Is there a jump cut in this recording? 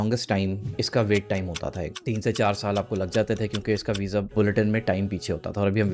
no; 0 cuts

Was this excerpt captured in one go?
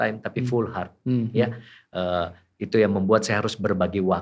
yes; 0 cuts

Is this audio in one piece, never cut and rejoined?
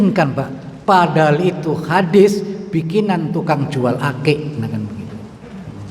yes; 0 cuts

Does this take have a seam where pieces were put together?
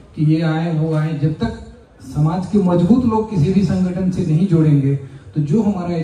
no; 0 cuts

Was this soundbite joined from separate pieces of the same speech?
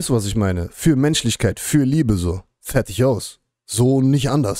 no; 0 cuts

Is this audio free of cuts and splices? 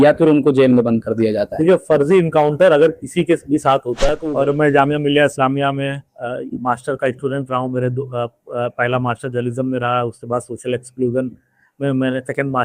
no; 1 cut; at 4.1 s

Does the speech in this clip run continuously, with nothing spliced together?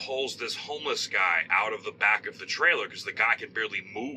yes; 0 cuts

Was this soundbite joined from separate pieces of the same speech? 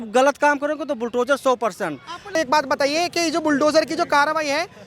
no; 0 cuts

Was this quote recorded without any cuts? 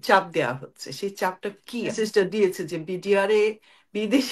no; 1 cut; at 1.9 s

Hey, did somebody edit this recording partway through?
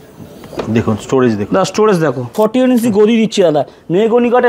yes; 1 cut; at 2.3 s

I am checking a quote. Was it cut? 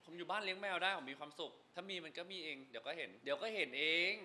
yes; 2 cuts; at 1.6 s, 3.2 s

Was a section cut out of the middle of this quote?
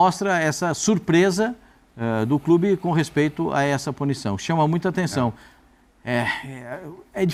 no; 0 cuts

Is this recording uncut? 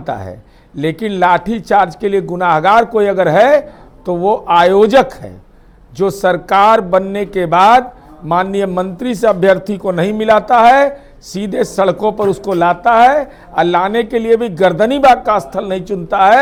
yes; 0 cuts

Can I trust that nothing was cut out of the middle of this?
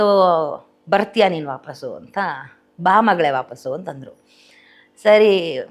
yes; 0 cuts

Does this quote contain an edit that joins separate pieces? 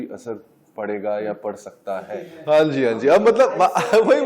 yes; 1 cut; at 2.3 s

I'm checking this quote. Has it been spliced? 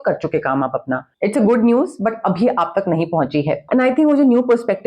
yes; 2 cuts; at 1.0 s, 3.6 s

